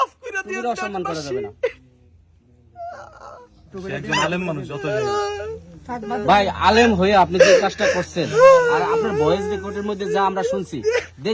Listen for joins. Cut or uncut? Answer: uncut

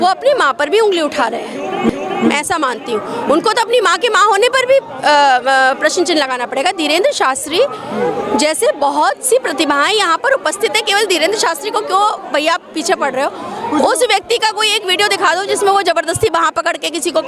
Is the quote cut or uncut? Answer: uncut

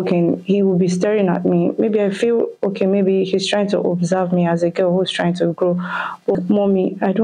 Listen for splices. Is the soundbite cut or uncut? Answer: cut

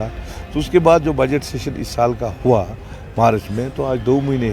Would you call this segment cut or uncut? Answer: uncut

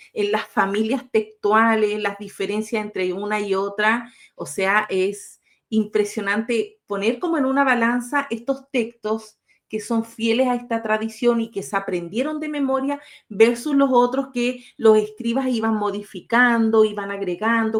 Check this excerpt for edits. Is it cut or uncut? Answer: uncut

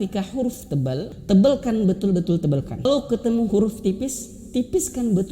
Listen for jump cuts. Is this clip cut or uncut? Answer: cut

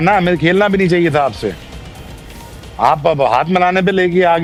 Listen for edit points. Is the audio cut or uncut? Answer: uncut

